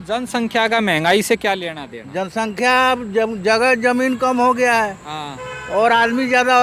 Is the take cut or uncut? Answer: uncut